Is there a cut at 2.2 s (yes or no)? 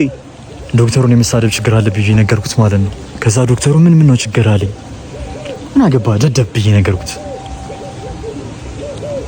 no